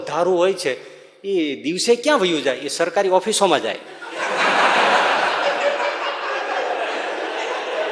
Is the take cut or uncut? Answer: uncut